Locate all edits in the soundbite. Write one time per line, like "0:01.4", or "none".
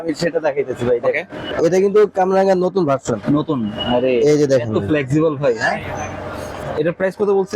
0:01.5
0:06.6